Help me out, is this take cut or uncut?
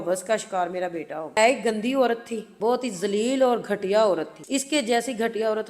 cut